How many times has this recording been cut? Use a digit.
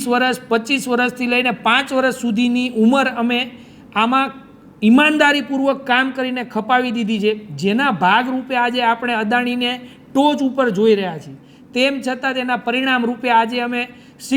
0